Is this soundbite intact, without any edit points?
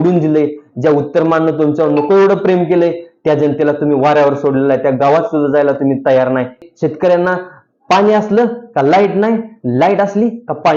no; 1 cut; at 6.7 s

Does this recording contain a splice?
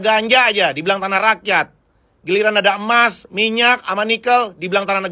no; 0 cuts

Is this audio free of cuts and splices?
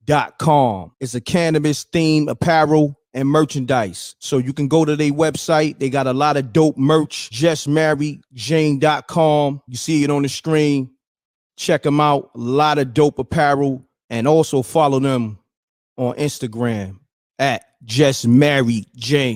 yes; 0 cuts

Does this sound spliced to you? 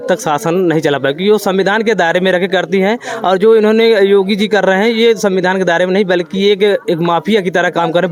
no; 0 cuts

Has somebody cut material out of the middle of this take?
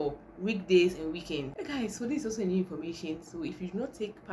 yes; 1 cut; at 1.6 s

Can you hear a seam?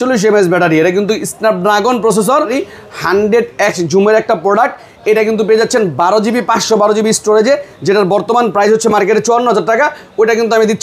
yes; 1 cut; at 2.6 s

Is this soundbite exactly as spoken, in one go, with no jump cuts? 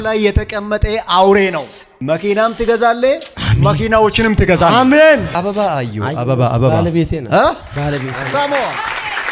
no; 1 cut; at 5.3 s

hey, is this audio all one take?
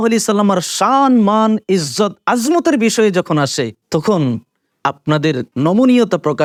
yes; 0 cuts

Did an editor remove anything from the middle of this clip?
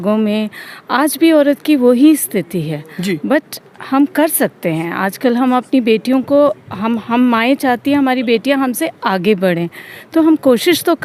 no; 0 cuts

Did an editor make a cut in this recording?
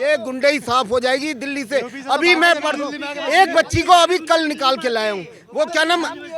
no; 0 cuts

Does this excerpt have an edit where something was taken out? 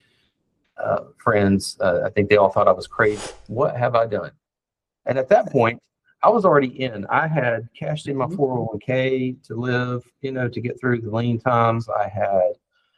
yes; 1 cut; at 3.2 s

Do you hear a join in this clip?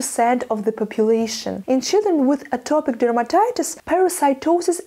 yes; 2 cuts; at 1.5 s, 3.7 s

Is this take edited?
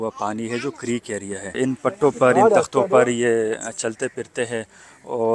yes; 1 cut; at 1.6 s

